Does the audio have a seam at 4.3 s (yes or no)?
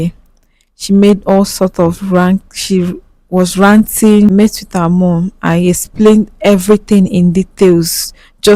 yes